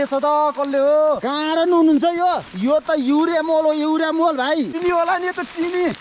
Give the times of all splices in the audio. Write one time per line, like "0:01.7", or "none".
0:04.8